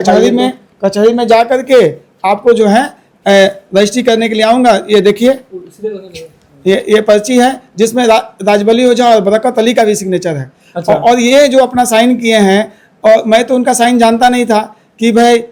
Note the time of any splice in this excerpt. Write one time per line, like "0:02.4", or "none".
none